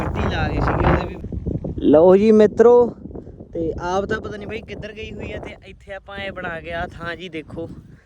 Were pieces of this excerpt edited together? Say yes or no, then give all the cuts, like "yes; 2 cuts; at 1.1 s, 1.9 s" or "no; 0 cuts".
yes; 1 cut; at 1.2 s